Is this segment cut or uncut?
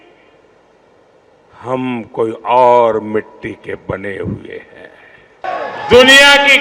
cut